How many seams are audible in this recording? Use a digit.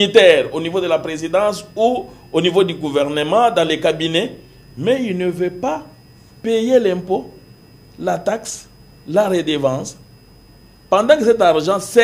0